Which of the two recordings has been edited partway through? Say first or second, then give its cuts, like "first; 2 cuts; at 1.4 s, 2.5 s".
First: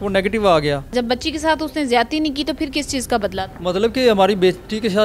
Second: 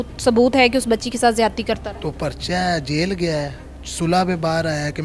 first; 1 cut; at 0.9 s